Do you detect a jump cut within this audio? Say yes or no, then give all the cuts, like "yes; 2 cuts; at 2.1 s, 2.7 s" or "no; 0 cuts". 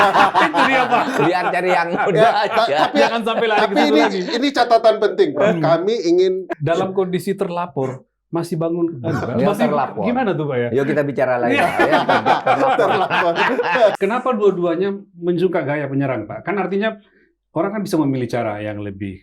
yes; 2 cuts; at 6.5 s, 13.9 s